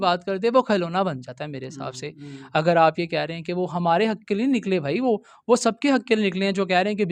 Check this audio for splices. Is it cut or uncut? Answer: uncut